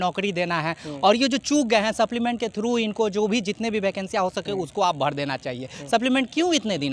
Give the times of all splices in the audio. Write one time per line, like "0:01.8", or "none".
none